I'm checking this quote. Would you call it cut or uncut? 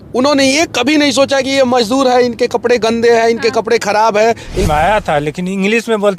cut